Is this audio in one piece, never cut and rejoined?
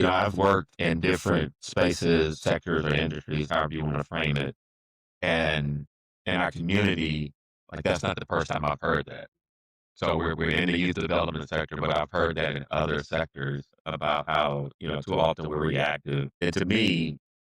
no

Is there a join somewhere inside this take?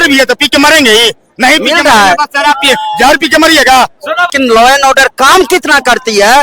yes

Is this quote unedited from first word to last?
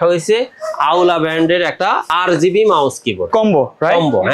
no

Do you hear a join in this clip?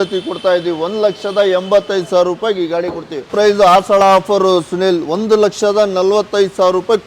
yes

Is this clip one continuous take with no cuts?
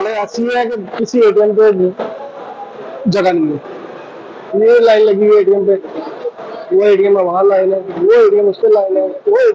yes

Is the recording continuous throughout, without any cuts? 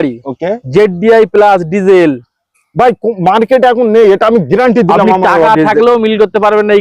yes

